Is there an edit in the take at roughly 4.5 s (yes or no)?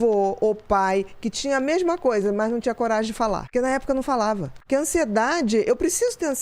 yes